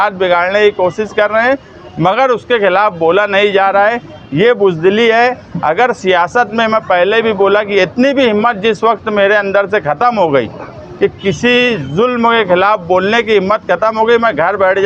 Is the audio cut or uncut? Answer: uncut